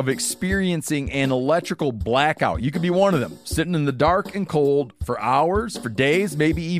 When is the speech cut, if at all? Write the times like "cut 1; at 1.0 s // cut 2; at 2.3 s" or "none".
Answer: none

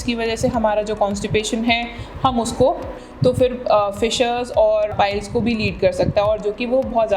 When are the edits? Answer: cut 1; at 3.0 s // cut 2; at 4.9 s

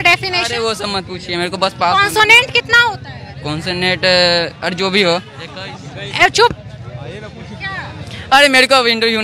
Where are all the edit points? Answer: none

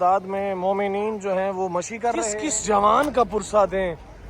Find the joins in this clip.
cut 1; at 2.3 s

